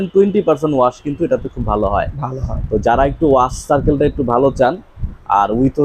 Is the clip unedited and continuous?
yes; 0 cuts

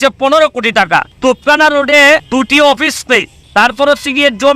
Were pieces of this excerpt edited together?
yes; 3 cuts; at 1.1 s, 2.3 s, 3.4 s

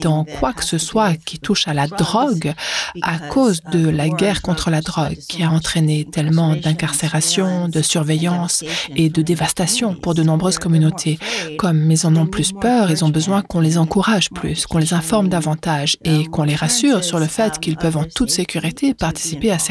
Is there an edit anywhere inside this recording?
no; 0 cuts

